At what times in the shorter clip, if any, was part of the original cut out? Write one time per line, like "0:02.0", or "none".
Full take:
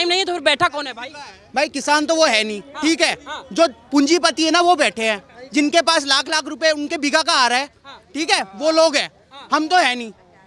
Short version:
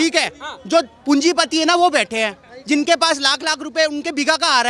none